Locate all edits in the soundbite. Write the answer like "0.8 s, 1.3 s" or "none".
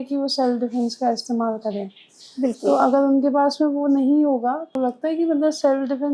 4.7 s

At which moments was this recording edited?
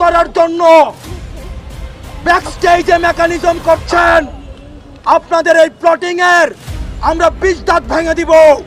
none

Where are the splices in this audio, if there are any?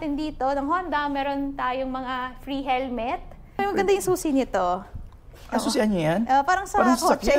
3.6 s

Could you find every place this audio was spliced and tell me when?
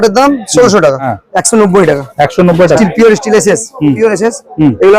1.1 s, 2.8 s

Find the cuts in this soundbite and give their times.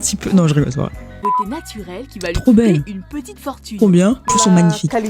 1.2 s, 4.3 s

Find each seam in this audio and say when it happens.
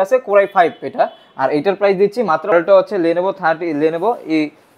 2.5 s

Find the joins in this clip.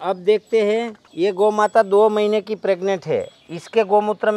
1.0 s

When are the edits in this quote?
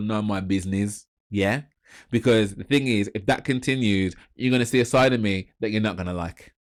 none

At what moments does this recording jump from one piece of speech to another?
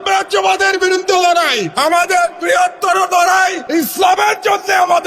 1.7 s, 3.6 s

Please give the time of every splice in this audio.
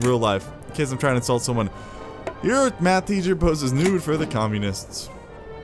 none

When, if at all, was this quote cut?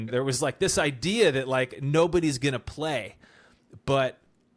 none

